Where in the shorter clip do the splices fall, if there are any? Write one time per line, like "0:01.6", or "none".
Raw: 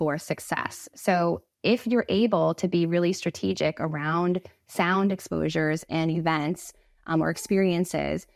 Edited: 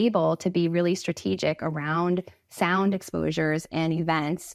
none

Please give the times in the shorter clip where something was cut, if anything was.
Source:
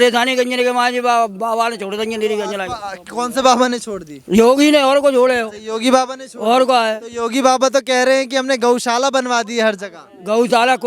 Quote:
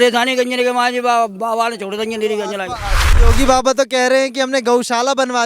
0:03.1

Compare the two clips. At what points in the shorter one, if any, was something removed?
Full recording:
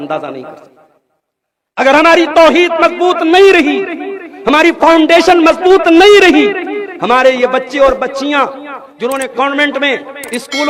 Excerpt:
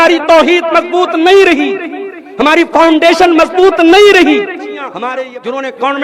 0:05.0

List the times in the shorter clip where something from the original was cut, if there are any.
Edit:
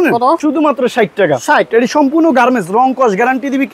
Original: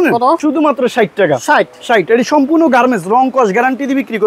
0:01.7

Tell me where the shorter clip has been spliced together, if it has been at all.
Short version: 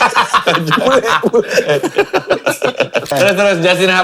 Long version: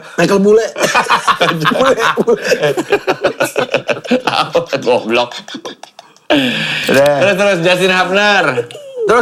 0:03.1

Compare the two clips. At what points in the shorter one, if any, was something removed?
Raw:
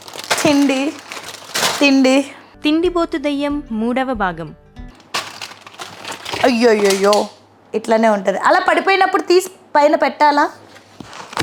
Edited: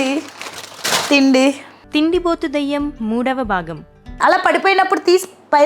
0:04.2

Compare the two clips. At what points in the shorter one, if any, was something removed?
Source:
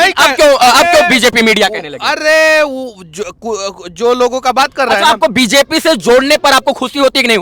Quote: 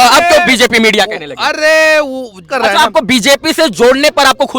0:02.5

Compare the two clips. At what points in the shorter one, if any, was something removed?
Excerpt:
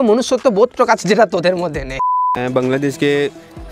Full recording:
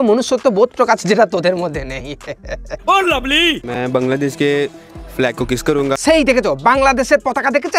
0:02.3

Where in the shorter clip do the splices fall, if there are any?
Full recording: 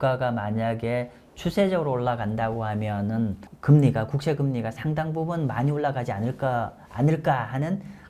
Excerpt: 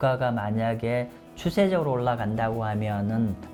none

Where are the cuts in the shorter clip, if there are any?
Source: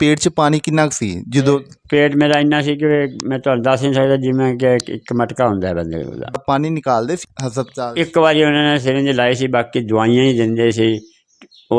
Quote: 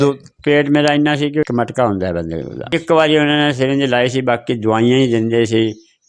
0:01.4
0:02.7

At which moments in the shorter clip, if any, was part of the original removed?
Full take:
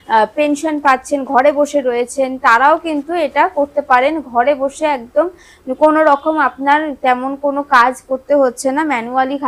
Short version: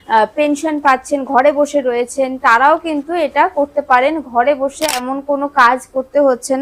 0:05.0

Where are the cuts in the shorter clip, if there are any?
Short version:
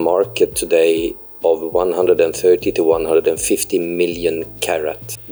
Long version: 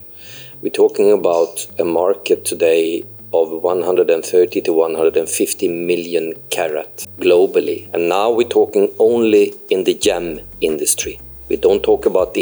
none

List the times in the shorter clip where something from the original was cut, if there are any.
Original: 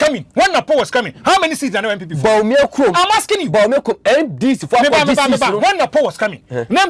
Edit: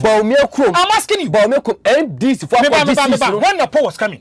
none

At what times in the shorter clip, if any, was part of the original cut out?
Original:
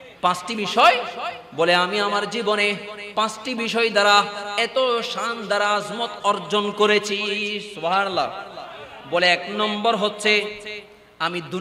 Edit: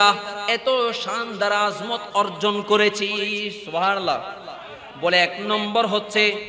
none

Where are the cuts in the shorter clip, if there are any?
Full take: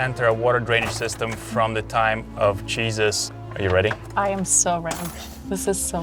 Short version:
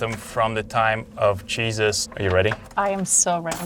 0:02.1

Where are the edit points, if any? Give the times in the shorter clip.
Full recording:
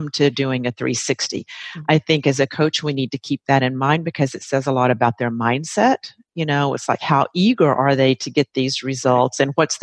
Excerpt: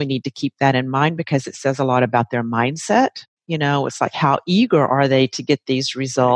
none

